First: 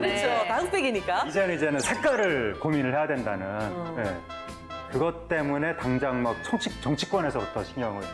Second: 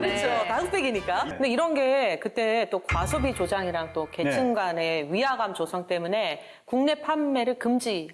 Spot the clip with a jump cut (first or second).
second